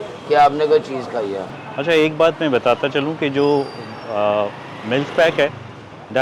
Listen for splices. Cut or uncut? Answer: cut